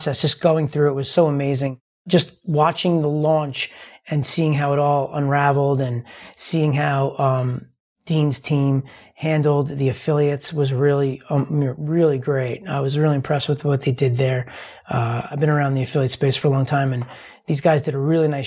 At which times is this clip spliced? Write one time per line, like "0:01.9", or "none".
0:01.9